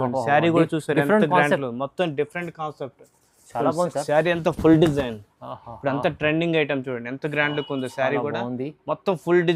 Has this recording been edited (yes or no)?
no